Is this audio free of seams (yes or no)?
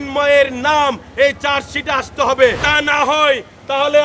no